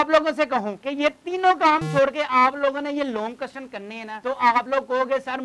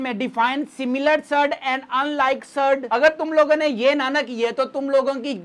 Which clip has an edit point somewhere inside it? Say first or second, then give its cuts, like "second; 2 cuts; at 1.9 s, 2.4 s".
second; 1 cut; at 2.8 s